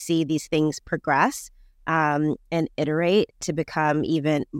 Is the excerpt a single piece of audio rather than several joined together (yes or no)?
yes